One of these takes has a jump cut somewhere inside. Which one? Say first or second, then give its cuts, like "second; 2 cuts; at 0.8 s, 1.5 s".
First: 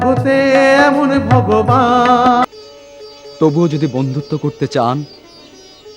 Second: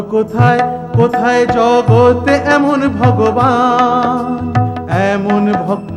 first; 1 cut; at 2.4 s